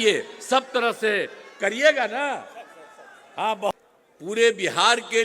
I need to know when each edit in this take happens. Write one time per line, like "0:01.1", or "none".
0:03.7